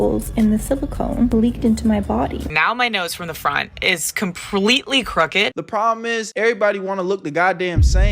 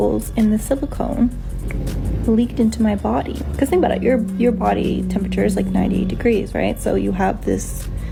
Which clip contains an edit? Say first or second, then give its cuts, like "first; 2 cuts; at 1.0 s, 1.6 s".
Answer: first; 3 cuts; at 1.3 s, 2.5 s, 5.5 s